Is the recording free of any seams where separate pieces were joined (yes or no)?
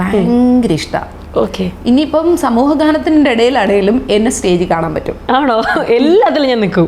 yes